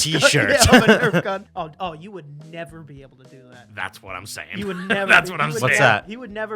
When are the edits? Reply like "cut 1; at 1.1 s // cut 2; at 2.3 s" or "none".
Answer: cut 1; at 1.5 s